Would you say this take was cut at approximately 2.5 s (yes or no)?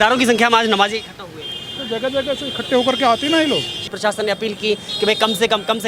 no